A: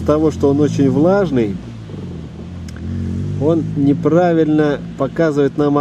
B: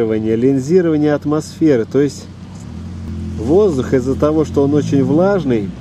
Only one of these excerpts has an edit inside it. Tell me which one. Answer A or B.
B